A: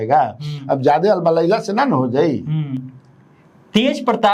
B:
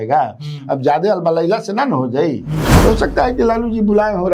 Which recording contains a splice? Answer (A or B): B